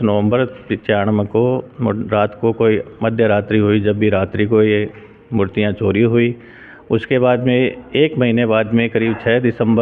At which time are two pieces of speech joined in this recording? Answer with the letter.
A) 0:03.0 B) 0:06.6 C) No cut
C